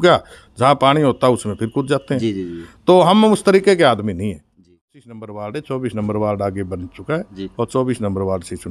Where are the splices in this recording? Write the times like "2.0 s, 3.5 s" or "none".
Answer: 4.7 s